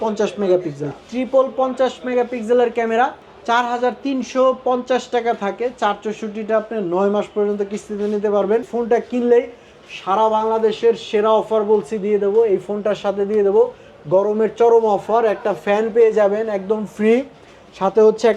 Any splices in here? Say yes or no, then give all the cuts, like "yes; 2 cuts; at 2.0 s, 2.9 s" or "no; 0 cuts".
yes; 2 cuts; at 3.3 s, 8.7 s